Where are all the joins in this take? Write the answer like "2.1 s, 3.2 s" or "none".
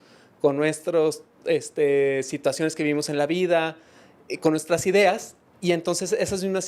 none